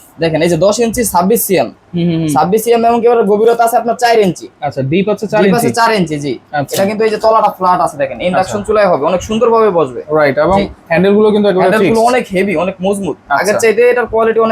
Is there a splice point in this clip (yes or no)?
no